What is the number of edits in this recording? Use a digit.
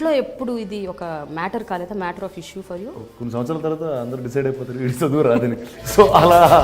1